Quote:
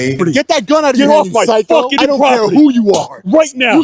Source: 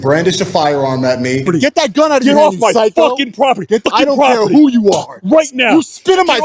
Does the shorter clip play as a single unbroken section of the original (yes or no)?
no